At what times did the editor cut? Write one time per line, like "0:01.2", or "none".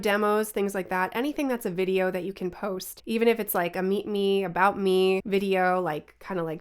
0:02.9
0:05.2